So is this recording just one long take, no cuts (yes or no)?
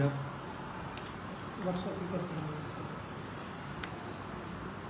yes